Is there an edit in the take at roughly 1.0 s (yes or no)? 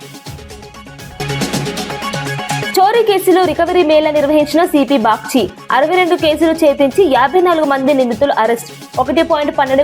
yes